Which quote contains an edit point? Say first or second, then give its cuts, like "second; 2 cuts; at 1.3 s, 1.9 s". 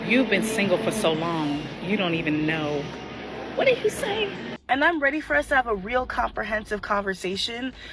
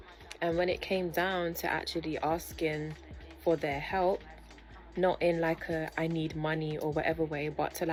first; 1 cut; at 4.8 s